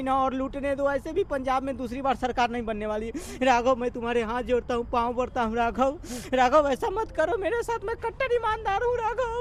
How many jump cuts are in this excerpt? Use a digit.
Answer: 0